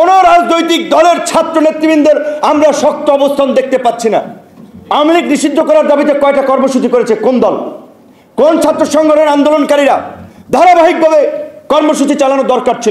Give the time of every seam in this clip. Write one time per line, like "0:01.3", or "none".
none